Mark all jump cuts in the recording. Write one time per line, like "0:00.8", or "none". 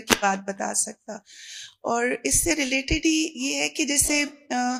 none

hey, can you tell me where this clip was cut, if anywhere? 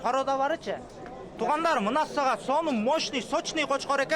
0:01.2

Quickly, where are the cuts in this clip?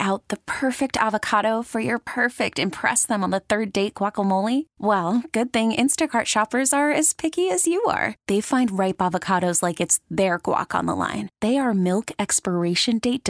none

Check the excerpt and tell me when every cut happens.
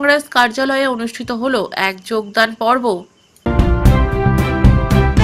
0:03.5

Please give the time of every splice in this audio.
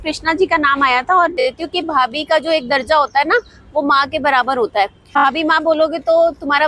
0:01.4
0:05.2

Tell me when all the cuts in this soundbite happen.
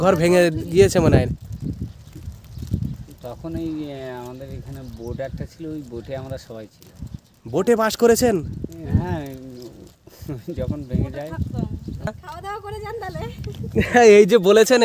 0:12.1

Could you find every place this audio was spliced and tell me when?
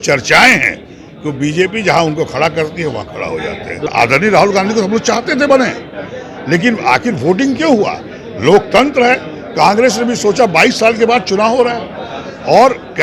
0:03.9

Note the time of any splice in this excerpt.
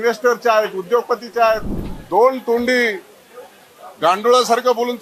0:01.7

